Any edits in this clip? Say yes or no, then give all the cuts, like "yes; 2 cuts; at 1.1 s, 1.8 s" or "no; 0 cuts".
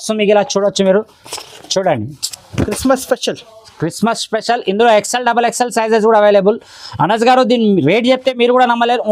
no; 0 cuts